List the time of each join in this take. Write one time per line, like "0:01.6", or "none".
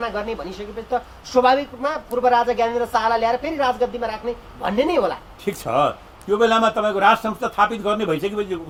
none